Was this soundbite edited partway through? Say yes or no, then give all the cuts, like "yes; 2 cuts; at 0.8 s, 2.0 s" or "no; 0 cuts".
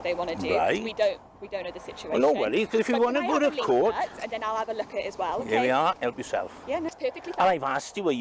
yes; 1 cut; at 6.9 s